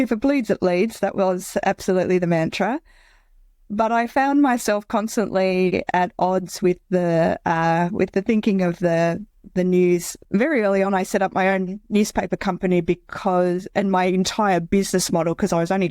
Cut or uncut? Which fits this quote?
cut